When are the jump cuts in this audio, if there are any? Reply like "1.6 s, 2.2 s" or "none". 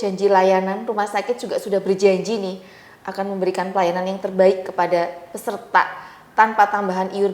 none